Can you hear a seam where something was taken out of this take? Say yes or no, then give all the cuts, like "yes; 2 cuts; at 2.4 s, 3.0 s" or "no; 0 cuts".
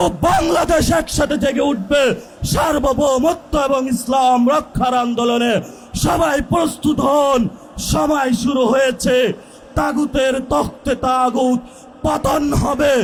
no; 0 cuts